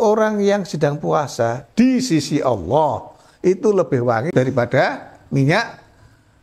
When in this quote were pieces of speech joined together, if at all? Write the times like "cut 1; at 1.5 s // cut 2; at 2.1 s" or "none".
cut 1; at 4.3 s

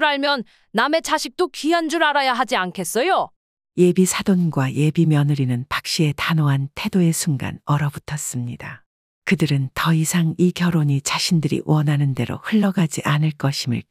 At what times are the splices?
none

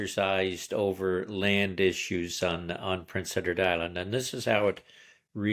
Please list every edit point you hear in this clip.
none

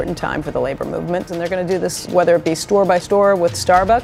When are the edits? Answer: cut 1; at 1.5 s // cut 2; at 3.0 s

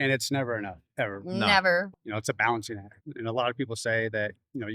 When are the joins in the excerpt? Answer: cut 1; at 1.9 s // cut 2; at 3.0 s

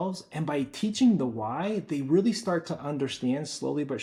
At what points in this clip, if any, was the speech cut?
none

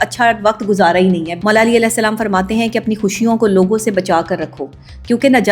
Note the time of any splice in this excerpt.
cut 1; at 1.3 s

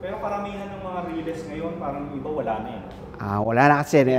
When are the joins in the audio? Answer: none

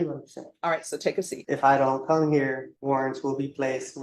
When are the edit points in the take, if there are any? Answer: cut 1; at 1.4 s // cut 2; at 2.7 s

